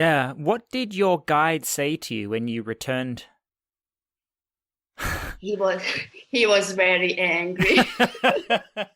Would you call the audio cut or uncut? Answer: uncut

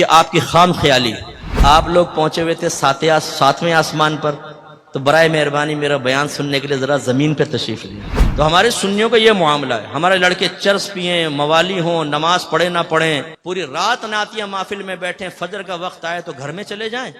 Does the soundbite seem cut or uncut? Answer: cut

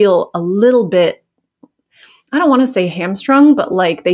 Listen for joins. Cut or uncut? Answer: uncut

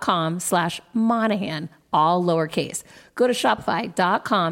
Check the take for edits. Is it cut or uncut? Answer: uncut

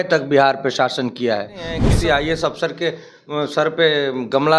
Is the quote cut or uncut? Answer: cut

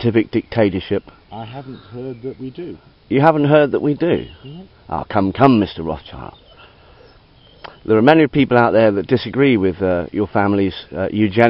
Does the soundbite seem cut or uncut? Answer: uncut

